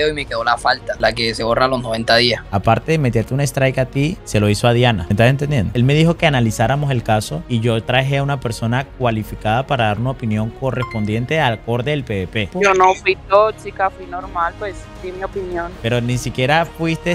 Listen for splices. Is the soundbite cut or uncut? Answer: cut